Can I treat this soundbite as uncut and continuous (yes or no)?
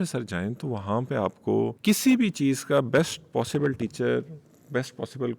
no